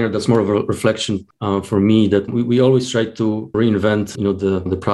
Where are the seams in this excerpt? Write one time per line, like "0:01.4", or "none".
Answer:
0:01.3
0:03.5